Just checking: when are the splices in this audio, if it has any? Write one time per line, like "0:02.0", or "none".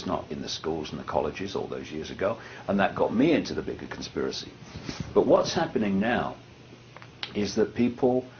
none